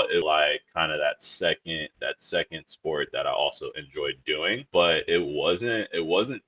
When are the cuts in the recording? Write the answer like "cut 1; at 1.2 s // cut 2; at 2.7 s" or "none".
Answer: none